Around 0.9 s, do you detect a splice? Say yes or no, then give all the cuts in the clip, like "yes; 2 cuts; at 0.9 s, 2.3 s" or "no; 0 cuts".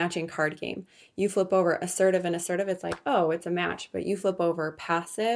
no; 0 cuts